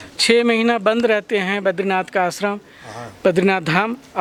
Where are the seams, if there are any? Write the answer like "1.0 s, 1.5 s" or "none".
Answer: none